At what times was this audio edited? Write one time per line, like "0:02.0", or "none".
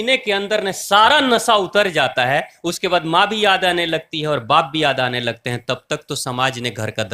none